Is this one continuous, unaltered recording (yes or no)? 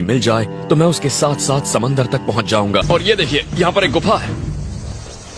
no